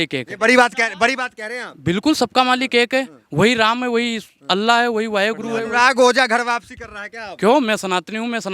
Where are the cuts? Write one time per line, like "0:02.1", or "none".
0:05.6